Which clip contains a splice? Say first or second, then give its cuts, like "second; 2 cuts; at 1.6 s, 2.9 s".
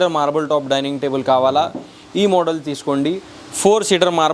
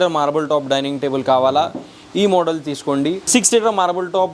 second; 1 cut; at 3.3 s